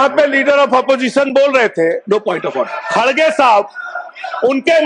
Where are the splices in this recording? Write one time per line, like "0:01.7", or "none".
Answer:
none